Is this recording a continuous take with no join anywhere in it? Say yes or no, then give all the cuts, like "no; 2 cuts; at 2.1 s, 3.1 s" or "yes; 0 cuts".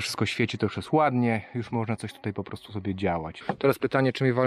no; 1 cut; at 3.3 s